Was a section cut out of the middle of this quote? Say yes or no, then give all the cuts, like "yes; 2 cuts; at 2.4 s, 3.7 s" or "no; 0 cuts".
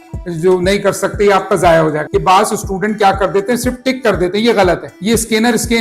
yes; 2 cuts; at 2.0 s, 4.9 s